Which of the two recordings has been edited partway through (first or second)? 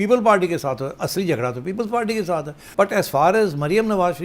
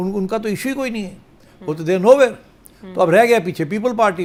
first